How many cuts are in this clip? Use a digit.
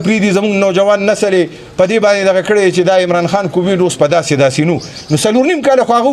0